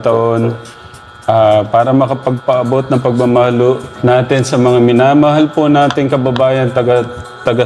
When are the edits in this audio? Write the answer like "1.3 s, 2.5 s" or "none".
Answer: 3.9 s